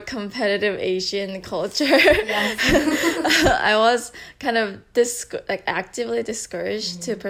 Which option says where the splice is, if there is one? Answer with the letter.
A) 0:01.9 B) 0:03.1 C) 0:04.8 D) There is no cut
D